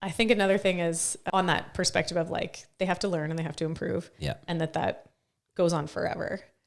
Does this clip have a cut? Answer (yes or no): yes